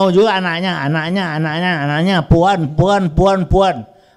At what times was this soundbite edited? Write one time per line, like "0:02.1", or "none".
none

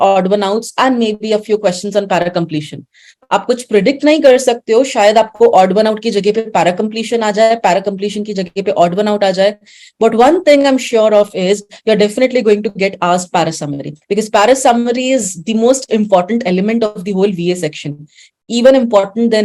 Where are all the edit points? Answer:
none

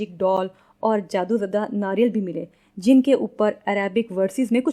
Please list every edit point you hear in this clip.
none

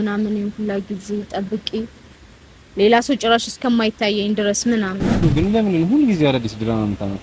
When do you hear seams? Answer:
0:05.2

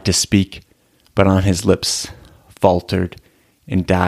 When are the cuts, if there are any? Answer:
none

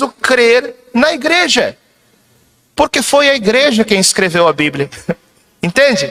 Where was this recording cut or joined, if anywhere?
none

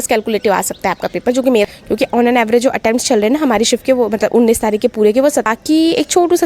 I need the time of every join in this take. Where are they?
0:01.6
0:05.5

